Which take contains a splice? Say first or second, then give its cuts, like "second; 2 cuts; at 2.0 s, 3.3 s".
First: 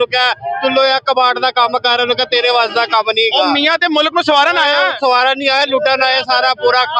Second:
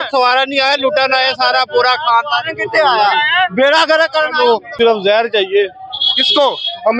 second; 1 cut; at 4.7 s